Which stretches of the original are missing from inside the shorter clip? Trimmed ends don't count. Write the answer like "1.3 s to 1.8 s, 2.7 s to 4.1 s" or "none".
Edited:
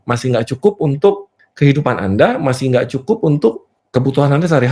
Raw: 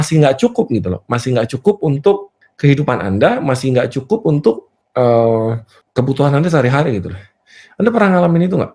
4.7 s to 5.7 s

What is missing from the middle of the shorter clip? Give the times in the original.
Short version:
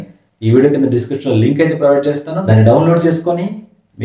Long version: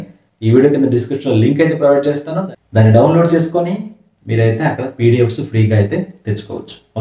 2.3 s to 2.6 s

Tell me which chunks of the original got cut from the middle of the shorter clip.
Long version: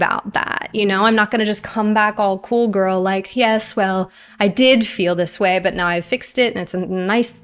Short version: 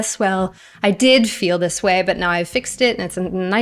none

